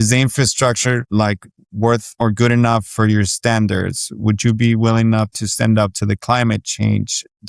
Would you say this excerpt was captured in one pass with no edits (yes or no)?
no